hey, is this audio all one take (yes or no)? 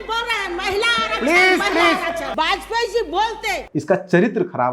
no